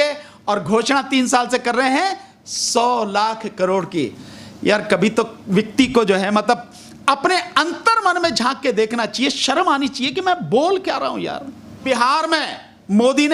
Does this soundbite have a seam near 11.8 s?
yes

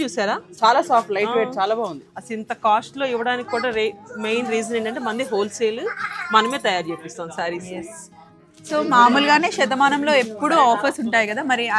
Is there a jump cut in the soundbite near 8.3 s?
yes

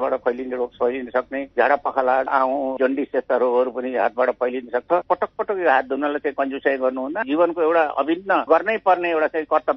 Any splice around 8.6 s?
no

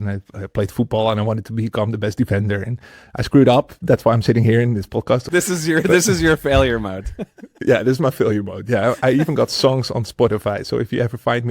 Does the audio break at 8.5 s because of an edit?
no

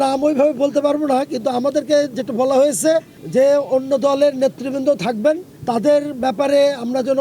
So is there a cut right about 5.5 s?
yes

